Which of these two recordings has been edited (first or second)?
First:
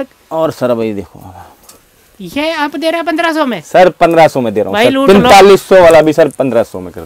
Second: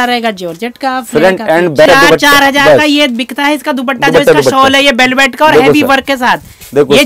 second